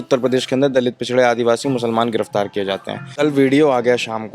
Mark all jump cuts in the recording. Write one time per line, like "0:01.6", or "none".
0:03.0